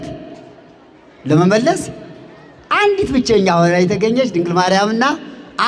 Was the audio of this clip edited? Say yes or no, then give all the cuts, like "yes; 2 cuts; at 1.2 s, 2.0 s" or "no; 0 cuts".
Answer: no; 0 cuts